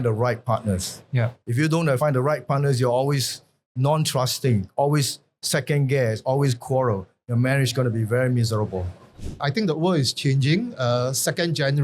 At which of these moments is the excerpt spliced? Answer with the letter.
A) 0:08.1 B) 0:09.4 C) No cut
B